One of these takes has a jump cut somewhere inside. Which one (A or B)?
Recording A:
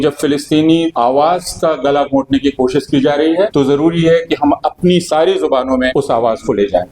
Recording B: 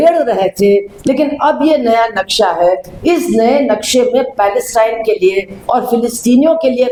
A